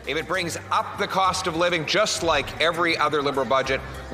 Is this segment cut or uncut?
uncut